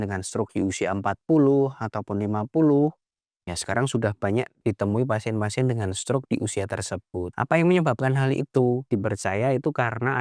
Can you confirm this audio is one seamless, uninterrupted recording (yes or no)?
no